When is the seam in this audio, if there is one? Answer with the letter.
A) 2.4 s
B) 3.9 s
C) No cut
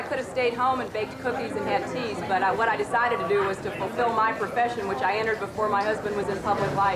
C